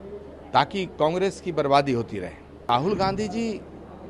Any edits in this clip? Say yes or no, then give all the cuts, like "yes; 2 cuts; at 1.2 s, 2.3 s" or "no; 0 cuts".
yes; 1 cut; at 2.7 s